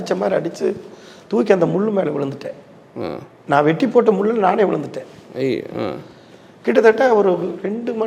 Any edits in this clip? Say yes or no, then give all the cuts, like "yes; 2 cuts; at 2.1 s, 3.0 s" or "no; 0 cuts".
no; 0 cuts